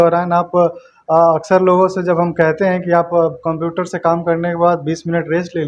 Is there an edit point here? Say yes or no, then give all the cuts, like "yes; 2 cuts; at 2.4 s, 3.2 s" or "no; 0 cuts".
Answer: no; 0 cuts